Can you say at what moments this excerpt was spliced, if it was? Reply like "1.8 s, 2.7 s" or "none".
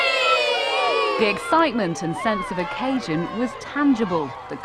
3.3 s